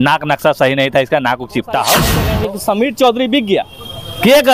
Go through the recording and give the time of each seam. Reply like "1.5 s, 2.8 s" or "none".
2.2 s